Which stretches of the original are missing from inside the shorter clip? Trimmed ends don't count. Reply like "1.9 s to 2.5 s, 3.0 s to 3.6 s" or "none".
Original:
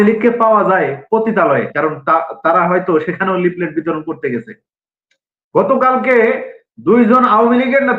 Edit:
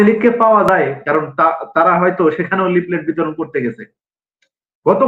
1.0 s to 1.7 s